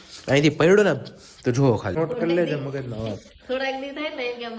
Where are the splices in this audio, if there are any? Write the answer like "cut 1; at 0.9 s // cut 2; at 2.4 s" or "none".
cut 1; at 2.0 s